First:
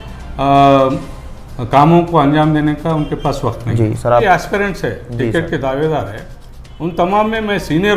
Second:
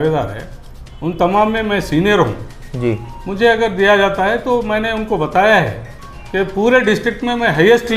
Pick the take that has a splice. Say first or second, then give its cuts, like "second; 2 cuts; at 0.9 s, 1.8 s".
first; 1 cut; at 4.2 s